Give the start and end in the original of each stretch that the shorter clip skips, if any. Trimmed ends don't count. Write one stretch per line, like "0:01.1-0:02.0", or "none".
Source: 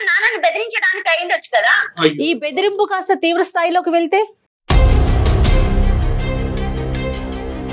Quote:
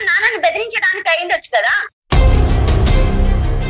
0:01.8-0:04.4